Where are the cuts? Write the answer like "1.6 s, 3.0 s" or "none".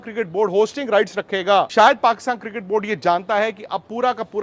1.7 s